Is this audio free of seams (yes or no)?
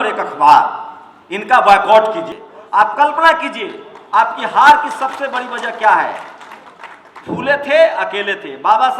no